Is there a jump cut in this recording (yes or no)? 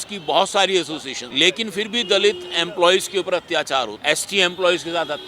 yes